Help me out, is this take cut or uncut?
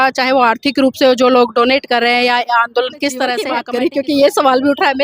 cut